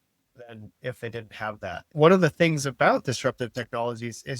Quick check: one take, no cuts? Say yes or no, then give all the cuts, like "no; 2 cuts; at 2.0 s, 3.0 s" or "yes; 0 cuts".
no; 1 cut; at 1.8 s